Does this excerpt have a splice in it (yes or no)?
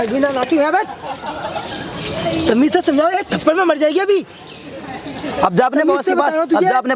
no